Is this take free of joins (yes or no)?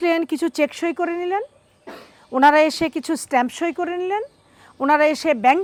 yes